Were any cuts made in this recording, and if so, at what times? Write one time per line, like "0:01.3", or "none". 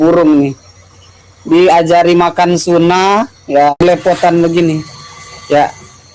0:03.7